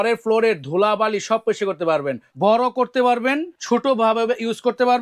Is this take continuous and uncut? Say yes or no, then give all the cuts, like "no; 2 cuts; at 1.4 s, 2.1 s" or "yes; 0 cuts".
no; 2 cuts; at 2.3 s, 3.5 s